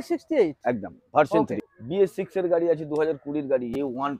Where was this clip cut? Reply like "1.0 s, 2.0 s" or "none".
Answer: 1.6 s